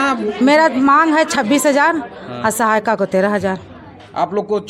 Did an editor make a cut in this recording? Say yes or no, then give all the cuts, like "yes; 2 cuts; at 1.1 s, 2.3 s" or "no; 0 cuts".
no; 0 cuts